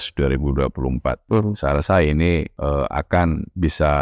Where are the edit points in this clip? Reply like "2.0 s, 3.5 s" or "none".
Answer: 1.2 s, 2.5 s